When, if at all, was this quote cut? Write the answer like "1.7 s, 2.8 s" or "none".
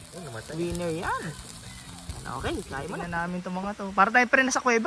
2.8 s